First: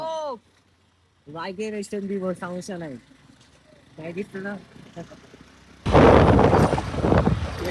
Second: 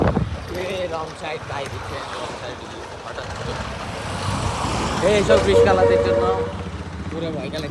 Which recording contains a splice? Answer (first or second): first